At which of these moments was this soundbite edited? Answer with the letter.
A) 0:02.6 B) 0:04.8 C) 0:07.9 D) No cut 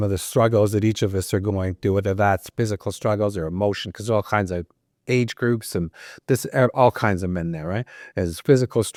D